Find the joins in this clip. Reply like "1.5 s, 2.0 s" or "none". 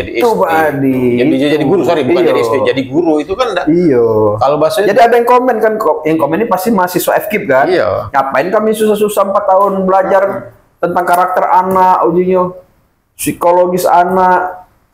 none